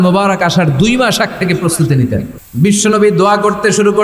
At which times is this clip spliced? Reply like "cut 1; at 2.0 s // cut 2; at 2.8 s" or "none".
cut 1; at 2.4 s